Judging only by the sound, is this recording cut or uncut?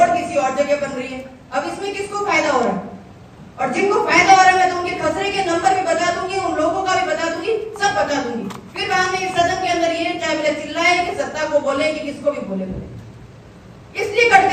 uncut